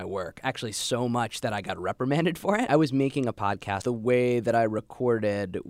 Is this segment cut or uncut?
cut